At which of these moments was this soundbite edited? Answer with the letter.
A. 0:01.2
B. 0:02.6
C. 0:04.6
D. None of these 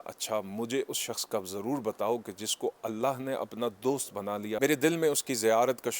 C